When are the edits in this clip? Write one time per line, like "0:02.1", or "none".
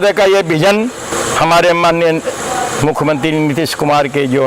0:01.1

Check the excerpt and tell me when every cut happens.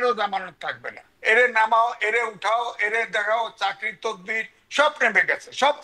0:01.1

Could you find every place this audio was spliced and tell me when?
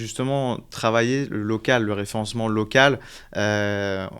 none

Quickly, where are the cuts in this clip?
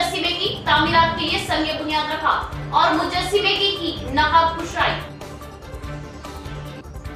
none

